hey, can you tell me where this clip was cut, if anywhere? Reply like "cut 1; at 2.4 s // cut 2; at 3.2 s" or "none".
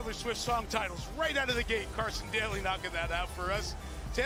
none